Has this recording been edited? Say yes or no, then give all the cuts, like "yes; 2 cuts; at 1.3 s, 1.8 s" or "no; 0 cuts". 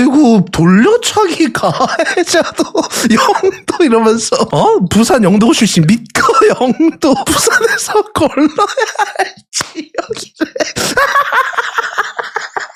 no; 0 cuts